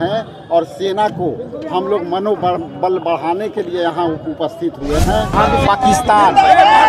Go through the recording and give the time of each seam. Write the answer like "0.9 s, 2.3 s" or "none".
5.3 s